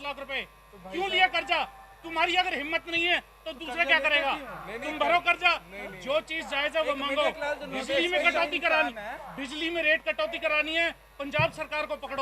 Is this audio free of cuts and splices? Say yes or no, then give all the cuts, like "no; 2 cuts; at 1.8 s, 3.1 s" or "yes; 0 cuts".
yes; 0 cuts